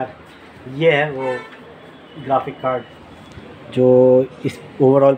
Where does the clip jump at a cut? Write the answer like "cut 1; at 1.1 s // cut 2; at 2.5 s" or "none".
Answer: none